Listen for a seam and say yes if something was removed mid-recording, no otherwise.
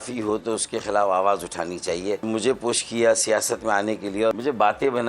yes